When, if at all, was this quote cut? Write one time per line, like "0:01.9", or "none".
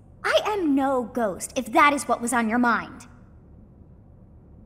0:03.1